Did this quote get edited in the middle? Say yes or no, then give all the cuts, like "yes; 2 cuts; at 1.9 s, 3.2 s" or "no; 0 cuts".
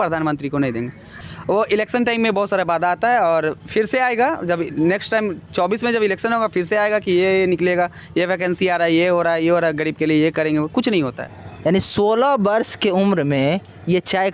yes; 2 cuts; at 1.2 s, 11.2 s